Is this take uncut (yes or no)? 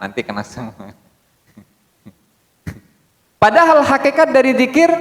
yes